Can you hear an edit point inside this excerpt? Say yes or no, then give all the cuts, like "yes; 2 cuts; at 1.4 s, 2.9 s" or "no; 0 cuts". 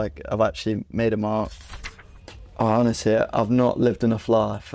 yes; 1 cut; at 1.6 s